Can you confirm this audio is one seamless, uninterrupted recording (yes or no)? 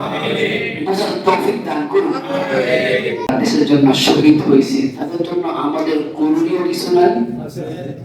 no